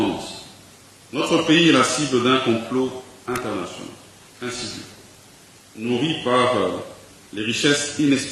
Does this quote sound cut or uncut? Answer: uncut